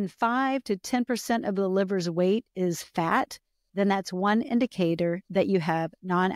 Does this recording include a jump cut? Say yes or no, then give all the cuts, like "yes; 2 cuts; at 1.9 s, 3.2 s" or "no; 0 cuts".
no; 0 cuts